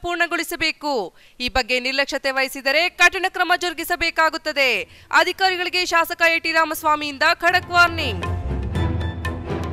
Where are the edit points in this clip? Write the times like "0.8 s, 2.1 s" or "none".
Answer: 8.5 s